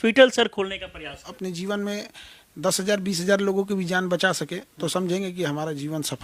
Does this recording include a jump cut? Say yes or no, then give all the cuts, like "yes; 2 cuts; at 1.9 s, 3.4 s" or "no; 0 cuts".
yes; 1 cut; at 1.3 s